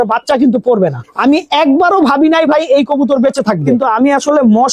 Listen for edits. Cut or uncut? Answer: cut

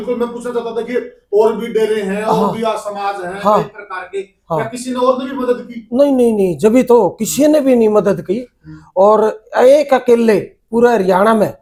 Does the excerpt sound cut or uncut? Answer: uncut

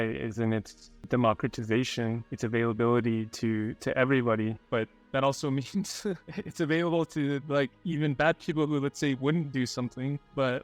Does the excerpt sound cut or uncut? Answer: cut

